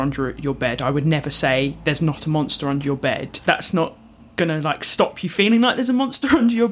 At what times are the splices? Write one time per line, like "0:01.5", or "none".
0:03.3